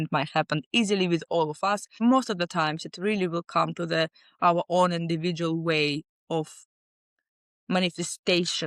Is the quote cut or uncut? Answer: cut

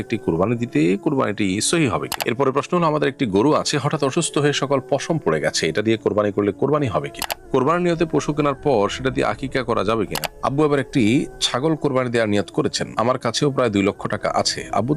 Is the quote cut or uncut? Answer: cut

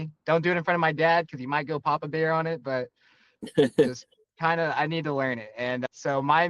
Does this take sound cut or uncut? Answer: uncut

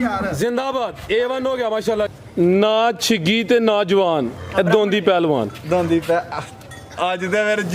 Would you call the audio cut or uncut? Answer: cut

